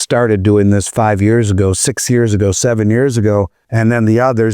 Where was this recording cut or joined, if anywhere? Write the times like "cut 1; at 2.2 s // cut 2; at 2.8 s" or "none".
cut 1; at 3.6 s